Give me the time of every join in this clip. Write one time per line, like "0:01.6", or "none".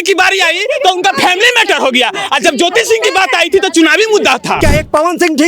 0:04.6